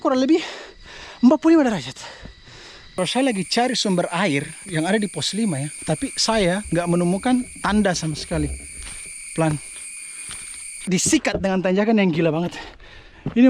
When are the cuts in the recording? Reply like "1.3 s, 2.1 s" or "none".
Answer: 2.9 s, 10.8 s